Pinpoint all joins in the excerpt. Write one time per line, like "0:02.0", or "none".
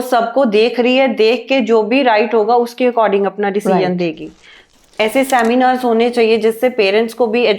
0:04.6